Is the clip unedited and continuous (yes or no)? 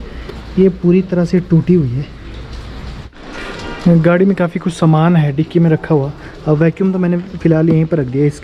no